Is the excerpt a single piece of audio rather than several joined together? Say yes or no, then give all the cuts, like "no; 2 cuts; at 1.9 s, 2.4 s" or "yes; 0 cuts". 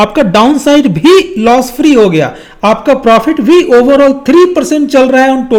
yes; 0 cuts